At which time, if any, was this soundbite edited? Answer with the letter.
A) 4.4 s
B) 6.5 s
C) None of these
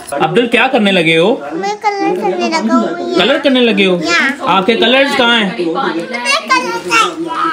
C